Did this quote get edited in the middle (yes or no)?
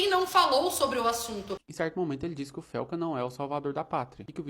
yes